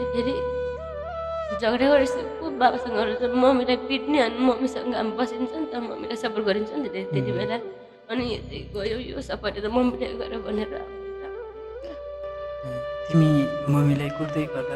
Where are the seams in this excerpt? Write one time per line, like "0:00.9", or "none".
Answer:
none